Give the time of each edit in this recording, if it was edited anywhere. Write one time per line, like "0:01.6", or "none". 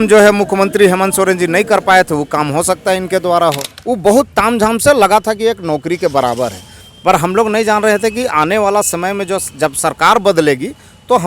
0:03.7